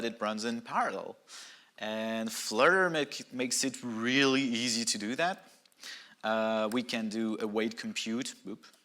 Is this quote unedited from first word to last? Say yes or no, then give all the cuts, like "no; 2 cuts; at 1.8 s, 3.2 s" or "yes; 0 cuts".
yes; 0 cuts